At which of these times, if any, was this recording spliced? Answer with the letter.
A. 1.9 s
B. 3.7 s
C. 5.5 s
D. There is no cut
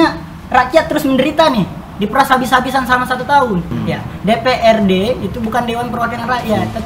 B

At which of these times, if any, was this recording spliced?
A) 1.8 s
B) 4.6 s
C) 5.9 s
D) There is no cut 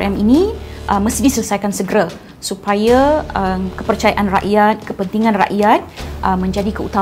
D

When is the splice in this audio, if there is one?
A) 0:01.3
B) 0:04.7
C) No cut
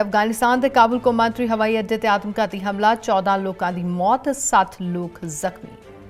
C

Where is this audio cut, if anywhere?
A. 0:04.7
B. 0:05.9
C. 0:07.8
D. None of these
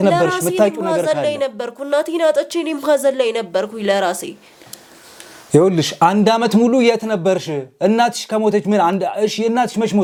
D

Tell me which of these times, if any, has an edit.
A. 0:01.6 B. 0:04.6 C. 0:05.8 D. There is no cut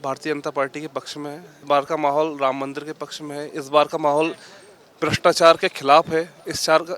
A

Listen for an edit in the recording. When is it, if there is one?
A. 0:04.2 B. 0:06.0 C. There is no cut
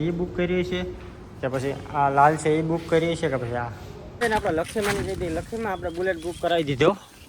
A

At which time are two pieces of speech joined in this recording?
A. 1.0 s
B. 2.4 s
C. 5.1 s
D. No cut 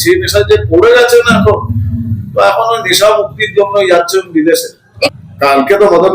C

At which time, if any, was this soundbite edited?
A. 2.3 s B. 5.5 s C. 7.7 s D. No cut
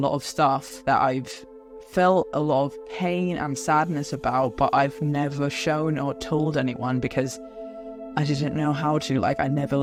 D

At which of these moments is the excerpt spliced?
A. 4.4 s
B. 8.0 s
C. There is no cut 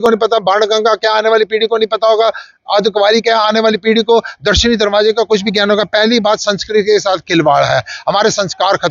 C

